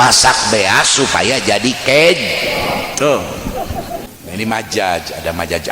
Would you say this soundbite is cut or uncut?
cut